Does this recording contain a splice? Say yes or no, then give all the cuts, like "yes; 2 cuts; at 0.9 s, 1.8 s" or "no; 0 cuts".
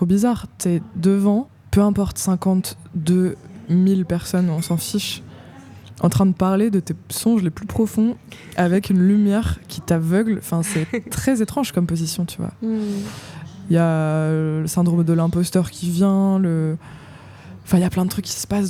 no; 0 cuts